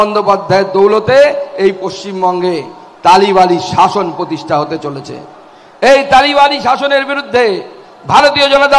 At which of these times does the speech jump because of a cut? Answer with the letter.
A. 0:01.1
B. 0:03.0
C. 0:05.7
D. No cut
D